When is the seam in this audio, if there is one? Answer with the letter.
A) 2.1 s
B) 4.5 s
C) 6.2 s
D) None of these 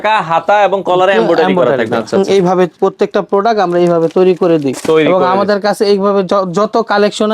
A